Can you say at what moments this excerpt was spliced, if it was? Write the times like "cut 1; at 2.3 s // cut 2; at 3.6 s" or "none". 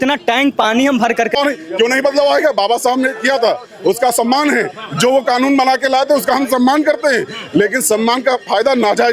cut 1; at 1.4 s